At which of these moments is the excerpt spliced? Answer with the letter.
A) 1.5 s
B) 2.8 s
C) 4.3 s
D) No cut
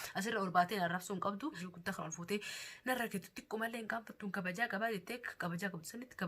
A